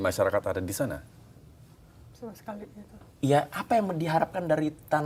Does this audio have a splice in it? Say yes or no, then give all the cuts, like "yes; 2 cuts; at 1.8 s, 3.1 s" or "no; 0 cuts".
no; 0 cuts